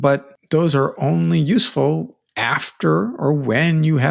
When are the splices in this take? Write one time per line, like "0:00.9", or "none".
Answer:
none